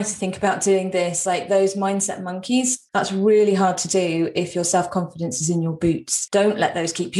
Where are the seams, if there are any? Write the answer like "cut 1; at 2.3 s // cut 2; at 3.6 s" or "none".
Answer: cut 1; at 2.8 s // cut 2; at 6.1 s